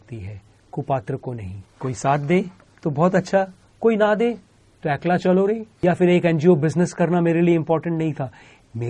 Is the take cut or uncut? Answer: cut